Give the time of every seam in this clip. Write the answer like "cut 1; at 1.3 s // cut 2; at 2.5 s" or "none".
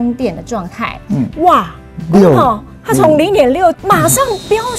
cut 1; at 1.3 s // cut 2; at 3.8 s